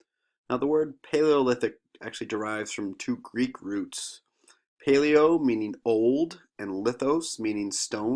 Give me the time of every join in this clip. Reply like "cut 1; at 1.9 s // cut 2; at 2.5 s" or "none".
cut 1; at 5.3 s